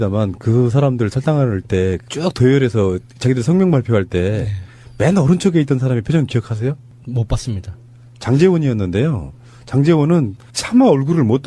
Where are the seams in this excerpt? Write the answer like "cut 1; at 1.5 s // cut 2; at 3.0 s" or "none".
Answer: cut 1; at 1.2 s